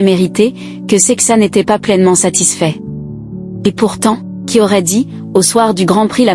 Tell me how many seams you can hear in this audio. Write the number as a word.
one